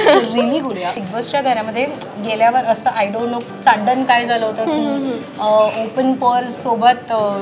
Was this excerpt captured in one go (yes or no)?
no